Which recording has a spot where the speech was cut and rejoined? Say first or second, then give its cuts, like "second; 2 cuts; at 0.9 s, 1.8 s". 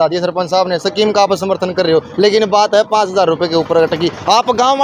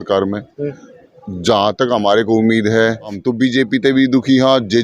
second; 1 cut; at 3.2 s